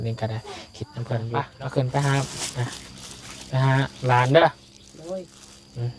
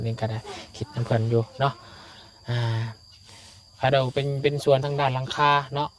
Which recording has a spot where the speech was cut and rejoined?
first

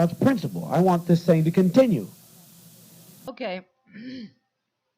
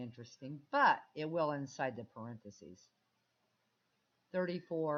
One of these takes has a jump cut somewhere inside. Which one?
first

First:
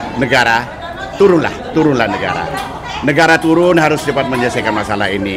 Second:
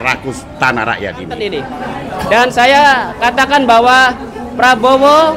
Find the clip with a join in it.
second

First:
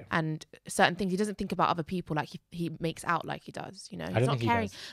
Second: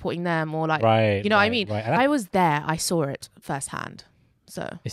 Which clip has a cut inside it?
second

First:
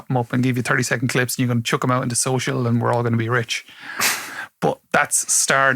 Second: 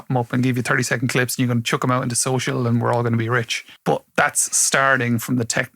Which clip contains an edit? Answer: second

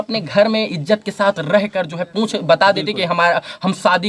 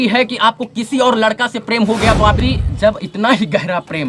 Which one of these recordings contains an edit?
second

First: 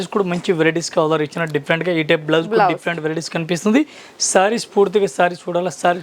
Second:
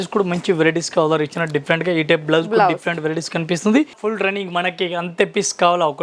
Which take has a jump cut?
second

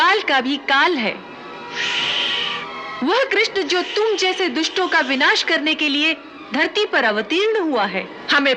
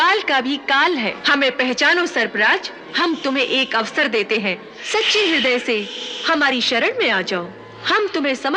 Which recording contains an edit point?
second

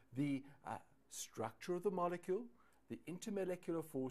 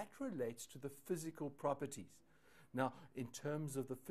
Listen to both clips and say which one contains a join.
first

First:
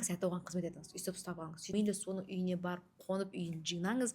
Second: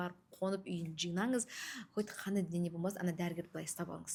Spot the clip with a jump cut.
first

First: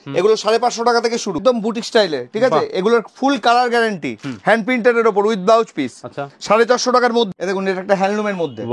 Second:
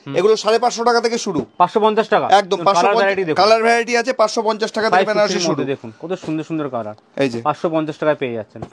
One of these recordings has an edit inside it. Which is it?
first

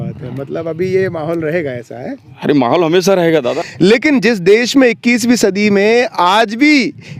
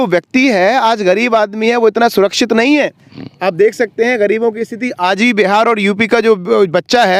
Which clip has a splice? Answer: first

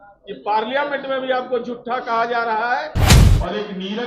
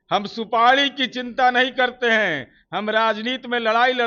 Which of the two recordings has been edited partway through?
first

